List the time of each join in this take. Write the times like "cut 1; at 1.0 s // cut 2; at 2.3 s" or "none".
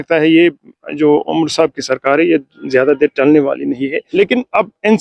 cut 1; at 4.0 s

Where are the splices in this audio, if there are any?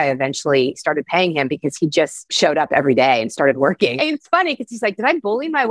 cut 1; at 0.8 s // cut 2; at 2.2 s // cut 3; at 4.0 s

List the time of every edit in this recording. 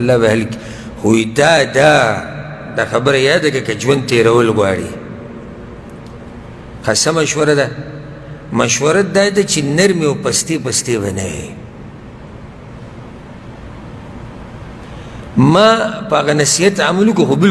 none

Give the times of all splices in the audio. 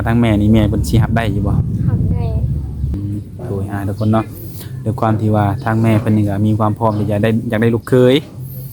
cut 1; at 2.9 s

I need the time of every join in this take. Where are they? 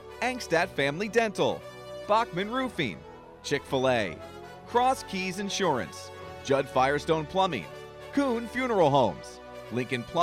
none

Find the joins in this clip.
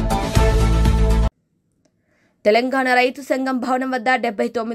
none

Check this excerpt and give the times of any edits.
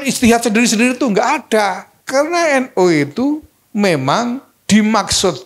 cut 1; at 1.9 s // cut 2; at 3.6 s // cut 3; at 4.5 s

